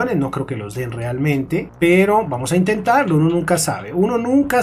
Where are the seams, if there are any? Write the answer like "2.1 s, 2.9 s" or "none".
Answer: none